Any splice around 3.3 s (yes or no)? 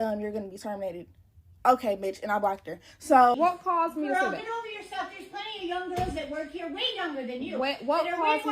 yes